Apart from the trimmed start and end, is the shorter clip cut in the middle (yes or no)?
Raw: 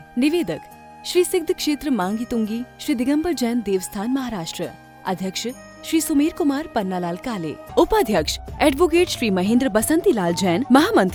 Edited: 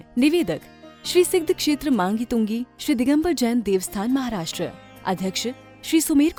no